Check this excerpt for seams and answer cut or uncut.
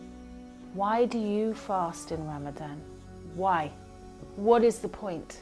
uncut